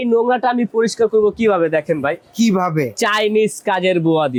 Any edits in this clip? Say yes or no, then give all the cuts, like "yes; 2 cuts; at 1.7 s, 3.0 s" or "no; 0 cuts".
no; 0 cuts